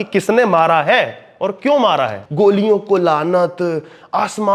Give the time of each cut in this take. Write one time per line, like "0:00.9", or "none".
0:02.2